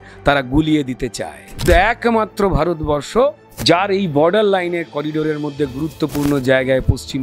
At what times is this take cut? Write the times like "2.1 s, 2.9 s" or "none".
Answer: 1.7 s, 3.5 s